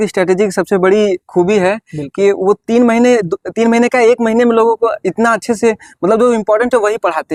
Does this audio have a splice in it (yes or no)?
no